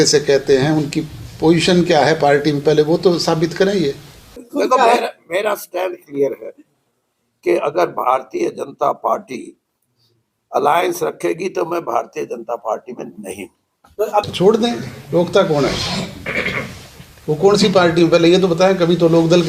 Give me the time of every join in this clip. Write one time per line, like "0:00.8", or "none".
0:04.5
0:14.3

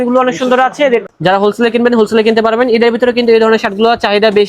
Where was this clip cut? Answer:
0:01.0

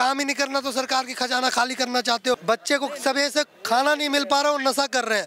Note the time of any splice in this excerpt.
0:02.4

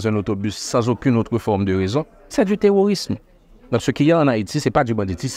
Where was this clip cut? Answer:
none

